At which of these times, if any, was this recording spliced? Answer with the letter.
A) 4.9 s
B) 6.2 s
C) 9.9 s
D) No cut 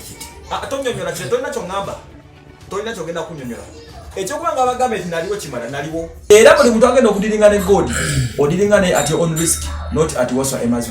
B